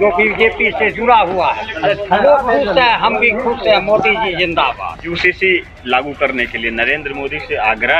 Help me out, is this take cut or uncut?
cut